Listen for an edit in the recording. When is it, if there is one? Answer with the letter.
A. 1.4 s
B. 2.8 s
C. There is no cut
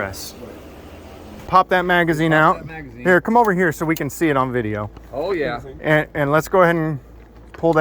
A